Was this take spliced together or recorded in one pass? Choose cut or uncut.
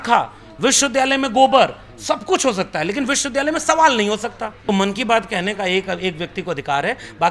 cut